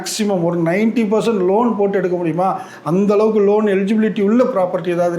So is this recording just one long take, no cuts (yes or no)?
yes